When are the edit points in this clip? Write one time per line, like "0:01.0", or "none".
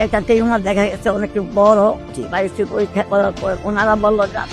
0:02.0
0:03.6